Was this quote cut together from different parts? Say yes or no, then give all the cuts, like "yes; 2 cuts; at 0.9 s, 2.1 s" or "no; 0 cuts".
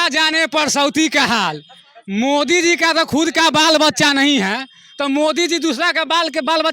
no; 0 cuts